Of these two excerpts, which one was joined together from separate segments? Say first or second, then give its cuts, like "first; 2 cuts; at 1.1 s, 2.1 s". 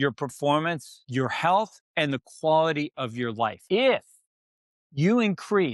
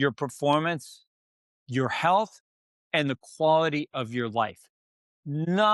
first; 3 cuts; at 0.9 s, 1.8 s, 3.6 s